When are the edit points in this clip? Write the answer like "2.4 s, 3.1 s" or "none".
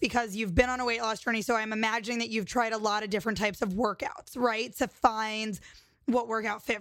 none